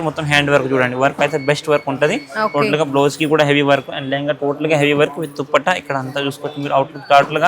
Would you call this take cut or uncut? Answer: uncut